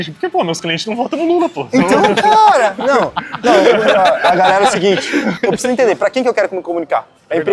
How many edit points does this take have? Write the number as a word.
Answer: zero